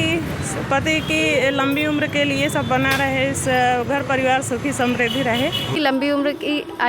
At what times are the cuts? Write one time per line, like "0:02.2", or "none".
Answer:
0:05.7